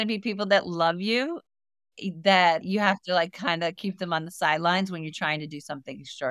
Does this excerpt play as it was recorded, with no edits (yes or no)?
no